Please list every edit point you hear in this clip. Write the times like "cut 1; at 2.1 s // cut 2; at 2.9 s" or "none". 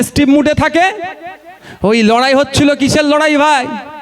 none

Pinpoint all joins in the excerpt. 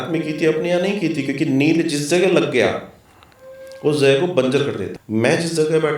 cut 1; at 4.9 s

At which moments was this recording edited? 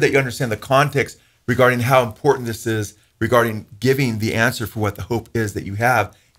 none

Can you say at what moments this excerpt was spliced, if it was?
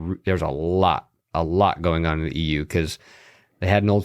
none

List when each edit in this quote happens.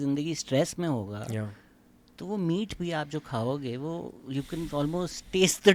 none

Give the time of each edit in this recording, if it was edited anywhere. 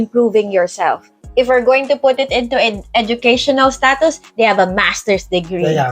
cut 1; at 1.1 s

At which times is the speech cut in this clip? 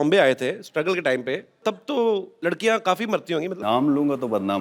cut 1; at 1.6 s // cut 2; at 2.3 s // cut 3; at 3.6 s

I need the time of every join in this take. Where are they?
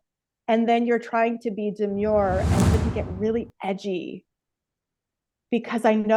cut 1; at 2.8 s

